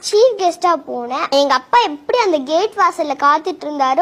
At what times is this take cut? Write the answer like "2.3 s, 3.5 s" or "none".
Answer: 1.2 s